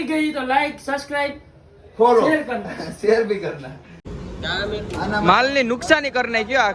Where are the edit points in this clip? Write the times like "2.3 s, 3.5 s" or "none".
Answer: 4.1 s